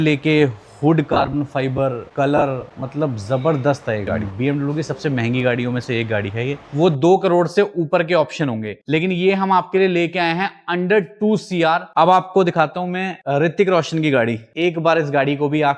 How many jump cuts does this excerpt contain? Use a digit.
4